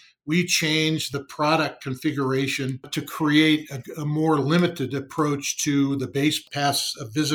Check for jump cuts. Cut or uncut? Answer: cut